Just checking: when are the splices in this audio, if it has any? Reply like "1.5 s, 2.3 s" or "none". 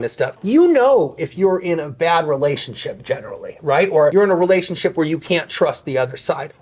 4.1 s